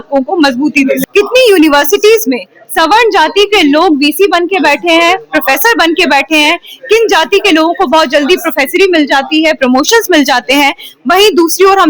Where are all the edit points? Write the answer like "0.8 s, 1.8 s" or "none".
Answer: 1.0 s

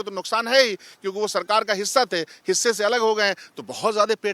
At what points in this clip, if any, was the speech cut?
none

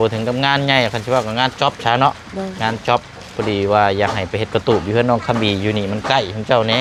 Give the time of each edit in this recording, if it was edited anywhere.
none

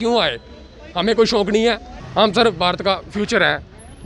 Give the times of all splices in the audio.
1.9 s

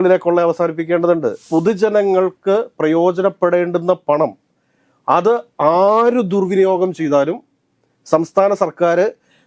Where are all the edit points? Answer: 1.4 s

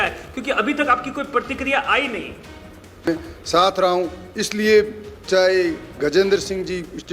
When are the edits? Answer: 3.1 s

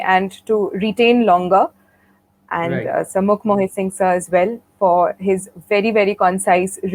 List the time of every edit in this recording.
none

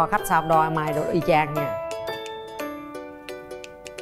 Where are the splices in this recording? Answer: none

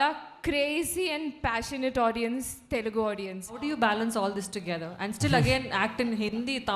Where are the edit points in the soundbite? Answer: 3.6 s

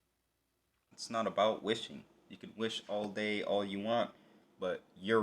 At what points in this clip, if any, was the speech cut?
0.9 s

